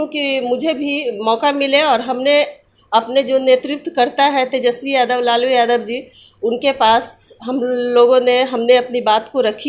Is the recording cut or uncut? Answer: uncut